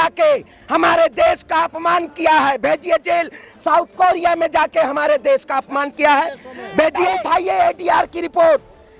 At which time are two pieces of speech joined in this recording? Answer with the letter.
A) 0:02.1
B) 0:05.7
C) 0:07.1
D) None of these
C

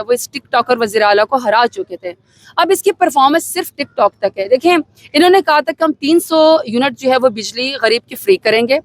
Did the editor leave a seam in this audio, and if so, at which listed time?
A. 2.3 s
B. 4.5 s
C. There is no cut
C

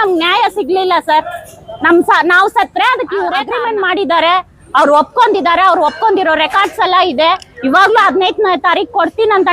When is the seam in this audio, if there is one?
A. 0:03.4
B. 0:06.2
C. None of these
A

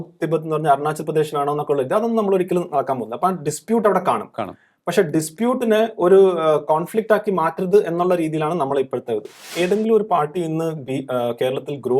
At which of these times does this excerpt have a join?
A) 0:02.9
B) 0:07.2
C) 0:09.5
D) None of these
C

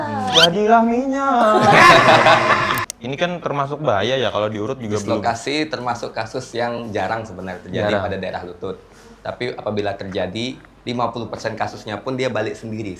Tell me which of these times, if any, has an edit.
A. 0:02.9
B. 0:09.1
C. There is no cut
A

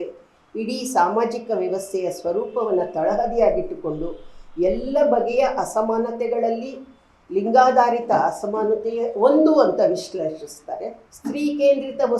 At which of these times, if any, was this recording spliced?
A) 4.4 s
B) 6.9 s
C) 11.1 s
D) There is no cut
C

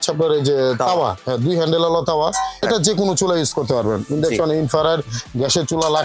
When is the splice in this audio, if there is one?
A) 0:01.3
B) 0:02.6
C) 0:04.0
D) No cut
B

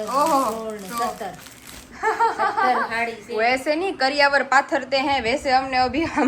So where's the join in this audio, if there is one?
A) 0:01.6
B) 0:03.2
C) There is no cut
B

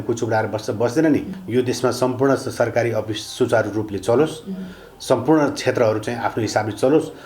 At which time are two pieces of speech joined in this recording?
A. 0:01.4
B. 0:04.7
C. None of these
A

